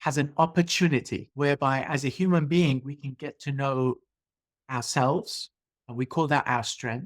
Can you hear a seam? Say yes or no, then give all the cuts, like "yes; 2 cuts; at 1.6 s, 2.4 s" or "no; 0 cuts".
yes; 1 cut; at 1.2 s